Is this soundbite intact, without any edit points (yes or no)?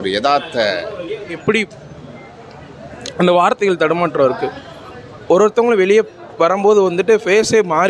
no